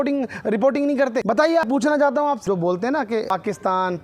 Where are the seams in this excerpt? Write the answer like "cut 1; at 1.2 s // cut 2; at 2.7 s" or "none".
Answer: cut 1; at 1.7 s // cut 2; at 2.4 s // cut 3; at 3.3 s